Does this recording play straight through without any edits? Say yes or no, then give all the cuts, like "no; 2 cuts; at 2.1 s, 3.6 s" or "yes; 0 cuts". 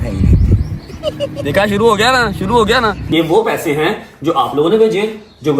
no; 2 cuts; at 1.3 s, 3.0 s